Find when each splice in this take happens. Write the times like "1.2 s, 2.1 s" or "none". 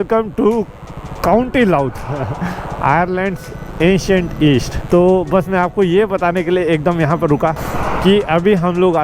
4.8 s, 7.7 s